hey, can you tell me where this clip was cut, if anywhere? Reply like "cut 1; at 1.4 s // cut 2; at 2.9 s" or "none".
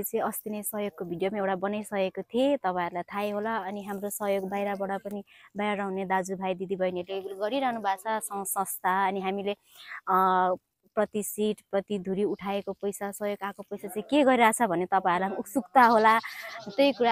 none